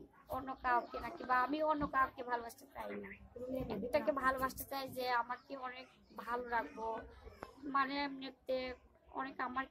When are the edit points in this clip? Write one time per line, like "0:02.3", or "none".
none